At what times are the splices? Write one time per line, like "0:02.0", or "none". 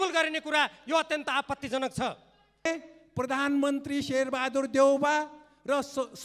0:02.7